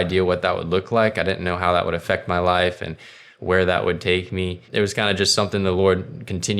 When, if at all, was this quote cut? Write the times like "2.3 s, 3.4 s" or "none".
4.6 s